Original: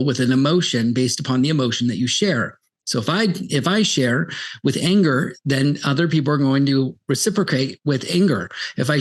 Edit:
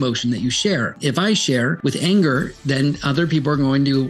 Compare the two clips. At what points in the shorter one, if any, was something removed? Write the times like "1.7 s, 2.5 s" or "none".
1.0 s, 1.8 s